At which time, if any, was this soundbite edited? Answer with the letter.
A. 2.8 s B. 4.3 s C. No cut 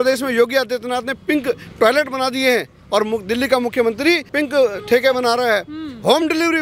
B